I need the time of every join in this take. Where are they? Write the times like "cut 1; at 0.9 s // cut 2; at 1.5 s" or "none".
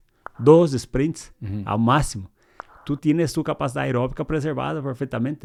none